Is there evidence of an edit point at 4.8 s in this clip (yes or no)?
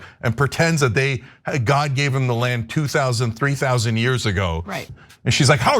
yes